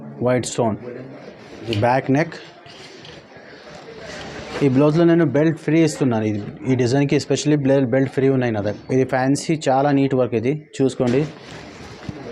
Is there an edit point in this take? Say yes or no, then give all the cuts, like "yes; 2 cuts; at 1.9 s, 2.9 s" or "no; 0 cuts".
yes; 2 cuts; at 1.7 s, 8.7 s